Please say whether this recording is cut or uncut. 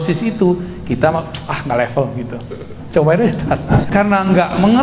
cut